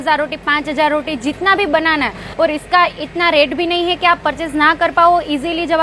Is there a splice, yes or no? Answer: yes